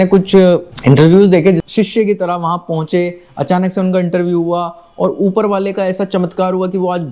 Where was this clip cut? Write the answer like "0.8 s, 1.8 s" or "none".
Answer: 1.6 s